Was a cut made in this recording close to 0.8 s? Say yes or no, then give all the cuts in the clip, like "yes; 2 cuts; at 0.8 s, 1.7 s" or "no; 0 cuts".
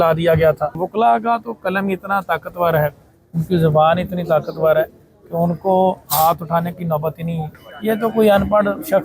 yes; 2 cuts; at 0.8 s, 7.5 s